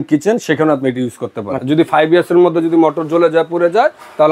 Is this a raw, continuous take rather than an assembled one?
no; 1 cut; at 1.6 s

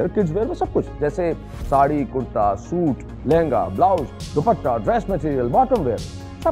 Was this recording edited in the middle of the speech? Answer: no; 0 cuts

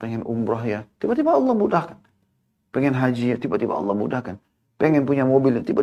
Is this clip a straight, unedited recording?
yes; 0 cuts

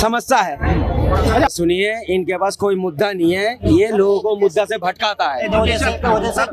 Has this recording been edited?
yes; 1 cut; at 1.5 s

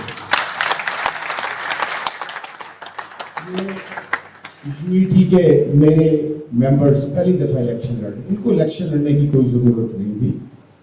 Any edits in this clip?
no; 0 cuts

